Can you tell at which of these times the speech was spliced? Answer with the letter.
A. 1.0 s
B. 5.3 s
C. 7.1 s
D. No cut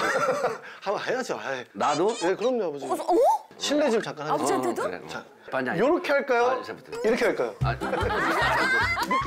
D